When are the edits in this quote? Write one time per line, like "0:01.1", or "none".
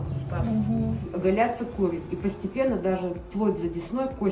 0:01.1

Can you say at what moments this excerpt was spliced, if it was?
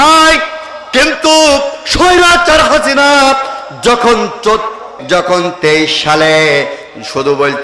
0:04.9

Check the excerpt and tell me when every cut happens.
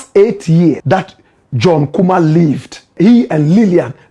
0:00.8
0:02.9

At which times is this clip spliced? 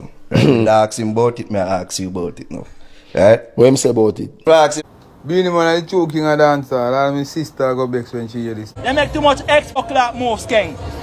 0:04.8
0:08.7
0:09.8

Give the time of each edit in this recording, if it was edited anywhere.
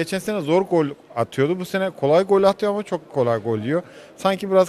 none

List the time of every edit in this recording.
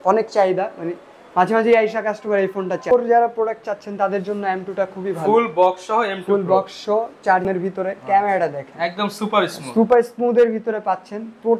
0:02.9
0:07.5

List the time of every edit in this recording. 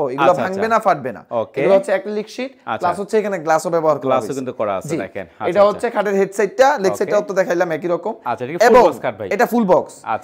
none

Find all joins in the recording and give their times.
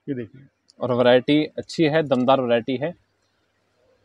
none

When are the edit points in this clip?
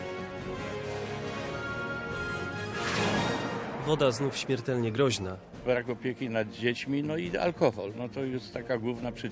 0:02.0

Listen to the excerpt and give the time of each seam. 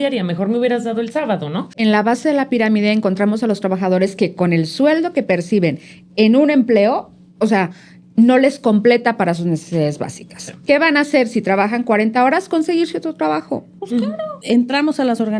0:01.7
0:14.3

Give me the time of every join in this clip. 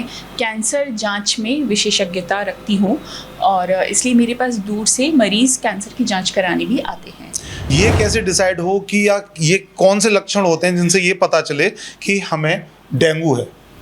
0:07.7

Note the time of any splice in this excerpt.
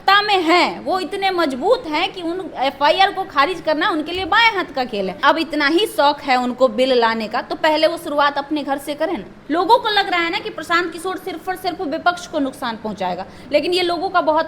0:05.2
0:09.3

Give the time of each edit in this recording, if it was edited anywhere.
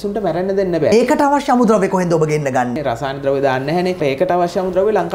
0:00.9
0:02.8
0:04.0

